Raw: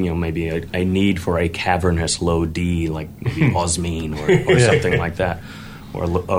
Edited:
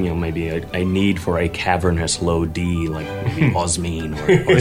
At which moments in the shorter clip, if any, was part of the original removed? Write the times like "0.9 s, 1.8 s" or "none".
none

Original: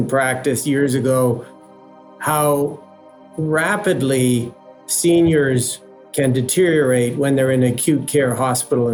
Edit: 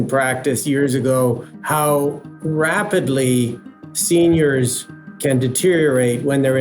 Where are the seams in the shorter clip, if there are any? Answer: 1.5 s, 2.3 s

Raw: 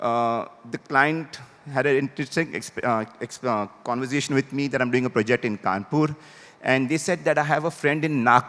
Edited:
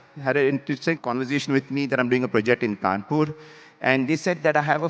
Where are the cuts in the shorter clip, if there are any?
1.0 s

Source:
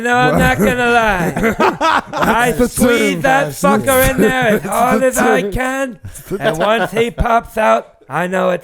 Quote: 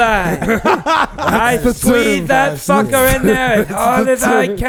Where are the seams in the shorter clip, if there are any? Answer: none

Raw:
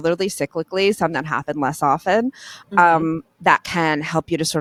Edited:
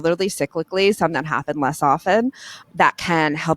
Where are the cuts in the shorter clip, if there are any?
2.6 s

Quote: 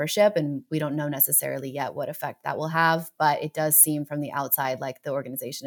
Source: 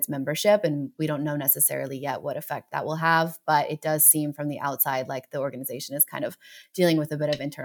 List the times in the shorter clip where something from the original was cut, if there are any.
none

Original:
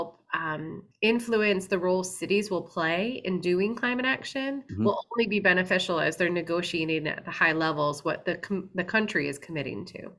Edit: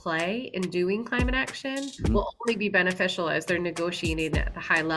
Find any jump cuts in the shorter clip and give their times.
none

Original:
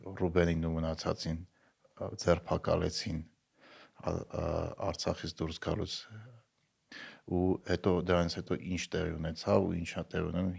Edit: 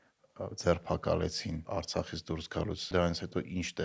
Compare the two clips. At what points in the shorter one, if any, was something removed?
1.6 s, 2.9 s

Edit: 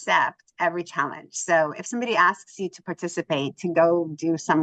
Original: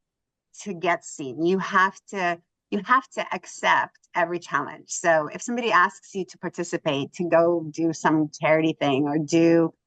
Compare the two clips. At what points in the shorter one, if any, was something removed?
none

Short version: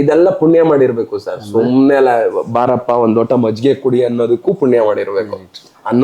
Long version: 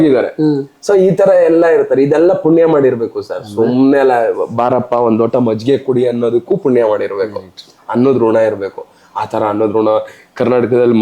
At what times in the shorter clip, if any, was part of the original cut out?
none

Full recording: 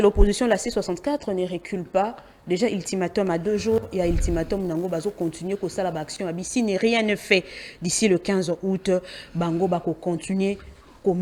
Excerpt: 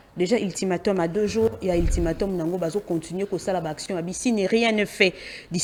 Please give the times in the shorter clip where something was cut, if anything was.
none

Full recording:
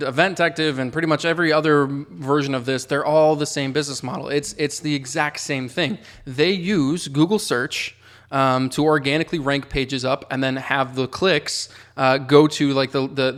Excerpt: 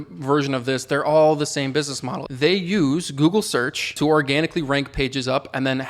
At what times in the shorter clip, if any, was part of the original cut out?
2.1 s, 3.9 s

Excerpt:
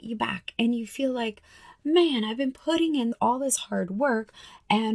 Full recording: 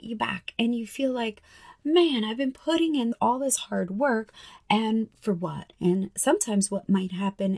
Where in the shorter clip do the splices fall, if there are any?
none

